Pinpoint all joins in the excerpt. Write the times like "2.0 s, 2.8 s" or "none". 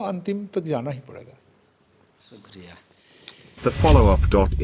none